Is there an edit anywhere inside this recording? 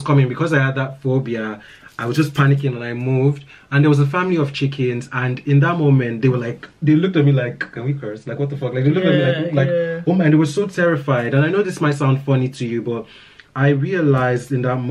no; 0 cuts

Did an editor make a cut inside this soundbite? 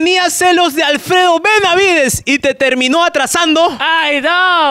no; 0 cuts

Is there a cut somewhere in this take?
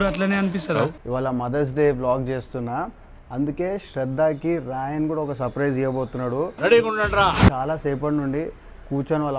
no; 0 cuts

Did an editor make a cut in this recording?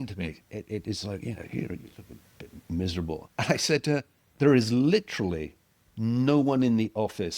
yes; 2 cuts; at 3.3 s, 4.2 s

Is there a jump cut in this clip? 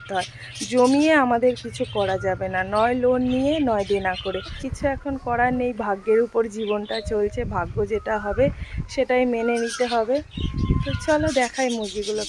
yes; 1 cut; at 4.6 s

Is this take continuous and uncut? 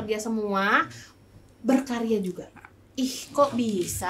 yes; 0 cuts

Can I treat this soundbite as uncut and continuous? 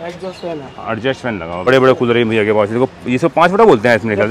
no; 1 cut; at 1.7 s

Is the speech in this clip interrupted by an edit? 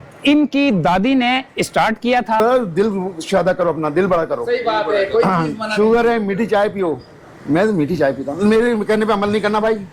yes; 1 cut; at 2.4 s

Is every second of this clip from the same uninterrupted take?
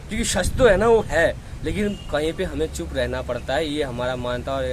yes; 0 cuts

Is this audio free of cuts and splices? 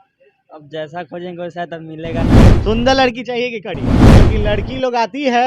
no; 4 cuts; at 2.2 s, 2.6 s, 3.7 s, 4.4 s

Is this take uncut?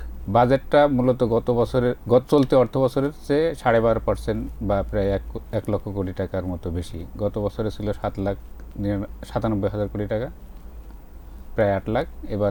yes; 0 cuts

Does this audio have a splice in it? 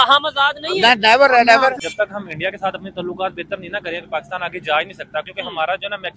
yes; 1 cut; at 1.8 s

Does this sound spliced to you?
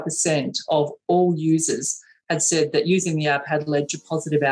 no; 0 cuts

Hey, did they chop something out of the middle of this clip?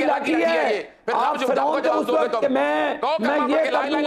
no; 0 cuts

